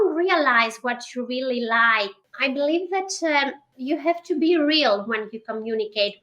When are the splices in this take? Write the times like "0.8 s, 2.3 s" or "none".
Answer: 2.2 s, 3.7 s